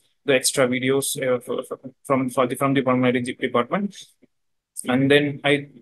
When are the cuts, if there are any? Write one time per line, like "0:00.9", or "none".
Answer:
none

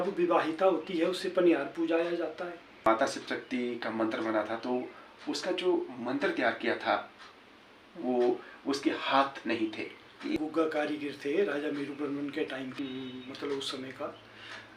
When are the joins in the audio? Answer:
0:02.8
0:10.4
0:12.7

